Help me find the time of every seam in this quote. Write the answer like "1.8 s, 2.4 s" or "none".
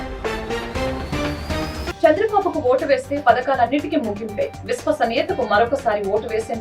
1.9 s